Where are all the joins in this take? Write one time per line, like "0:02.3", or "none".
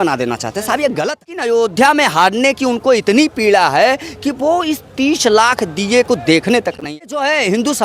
0:01.4
0:06.9